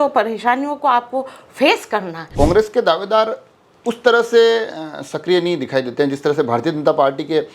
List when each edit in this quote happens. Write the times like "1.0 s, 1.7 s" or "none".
2.2 s